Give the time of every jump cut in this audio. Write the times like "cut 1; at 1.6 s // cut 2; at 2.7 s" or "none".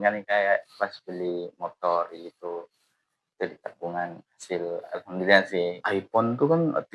cut 1; at 5.8 s